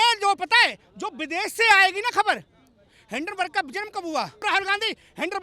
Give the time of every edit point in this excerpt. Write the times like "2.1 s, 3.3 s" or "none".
4.4 s